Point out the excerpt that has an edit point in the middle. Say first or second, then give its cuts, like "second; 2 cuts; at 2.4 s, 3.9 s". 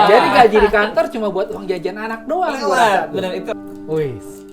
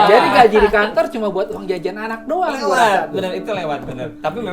first; 1 cut; at 3.5 s